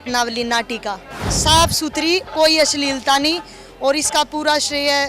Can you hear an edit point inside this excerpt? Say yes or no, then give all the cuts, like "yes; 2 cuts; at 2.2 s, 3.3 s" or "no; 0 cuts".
yes; 1 cut; at 1.2 s